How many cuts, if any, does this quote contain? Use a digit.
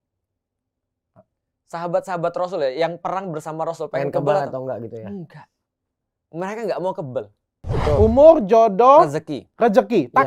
1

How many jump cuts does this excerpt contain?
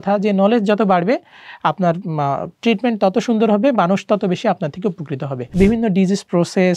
1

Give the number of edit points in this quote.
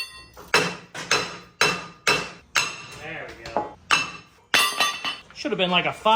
0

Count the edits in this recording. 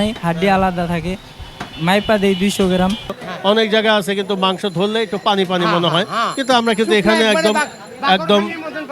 1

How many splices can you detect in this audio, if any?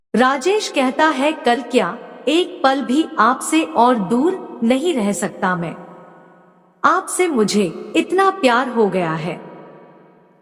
0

